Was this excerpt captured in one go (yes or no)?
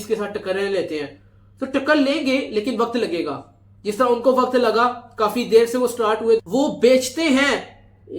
no